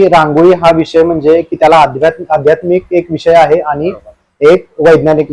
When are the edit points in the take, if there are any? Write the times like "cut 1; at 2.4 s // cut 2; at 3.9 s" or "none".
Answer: none